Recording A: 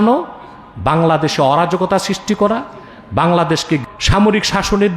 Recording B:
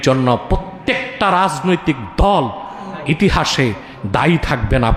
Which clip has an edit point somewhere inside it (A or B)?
A